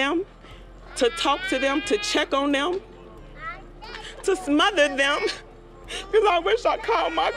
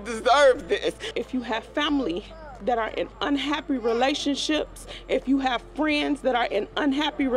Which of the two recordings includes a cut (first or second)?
second